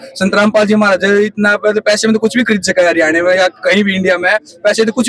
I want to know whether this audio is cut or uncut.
uncut